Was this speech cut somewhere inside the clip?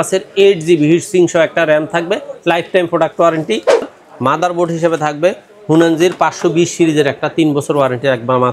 yes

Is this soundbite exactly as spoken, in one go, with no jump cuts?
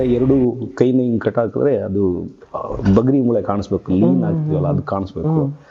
yes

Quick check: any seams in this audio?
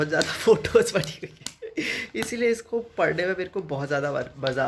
no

